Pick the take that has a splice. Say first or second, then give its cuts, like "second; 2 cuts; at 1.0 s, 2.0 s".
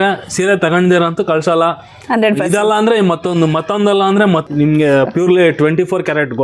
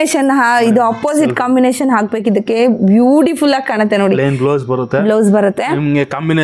first; 1 cut; at 4.5 s